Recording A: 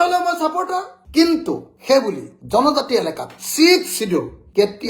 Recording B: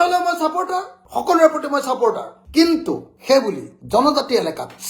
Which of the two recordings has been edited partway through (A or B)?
A